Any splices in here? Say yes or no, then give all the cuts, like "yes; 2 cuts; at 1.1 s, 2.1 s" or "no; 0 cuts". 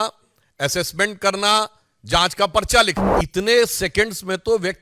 yes; 1 cut; at 3.1 s